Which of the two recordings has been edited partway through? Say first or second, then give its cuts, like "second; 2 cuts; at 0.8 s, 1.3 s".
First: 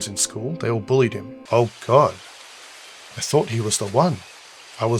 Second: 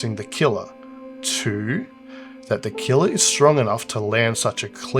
first; 1 cut; at 1.4 s